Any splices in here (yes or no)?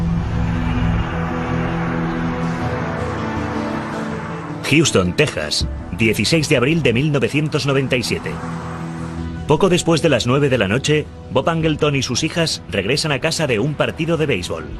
no